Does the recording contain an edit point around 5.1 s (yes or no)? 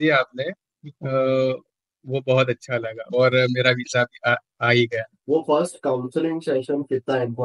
yes